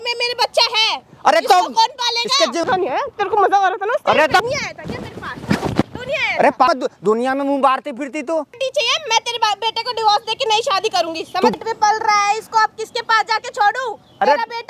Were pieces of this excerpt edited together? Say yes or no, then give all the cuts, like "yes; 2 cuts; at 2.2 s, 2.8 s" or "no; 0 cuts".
yes; 5 cuts; at 2.6 s, 4.4 s, 6.7 s, 8.5 s, 11.5 s